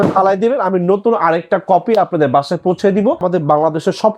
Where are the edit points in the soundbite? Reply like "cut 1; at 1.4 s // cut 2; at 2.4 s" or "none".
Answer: cut 1; at 3.2 s